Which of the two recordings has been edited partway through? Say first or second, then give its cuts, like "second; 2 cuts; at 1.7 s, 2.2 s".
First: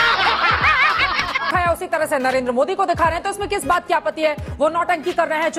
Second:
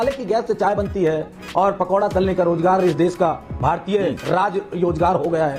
first; 1 cut; at 1.5 s